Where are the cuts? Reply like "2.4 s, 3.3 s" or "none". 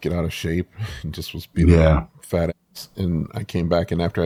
none